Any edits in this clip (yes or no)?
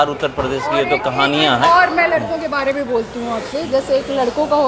no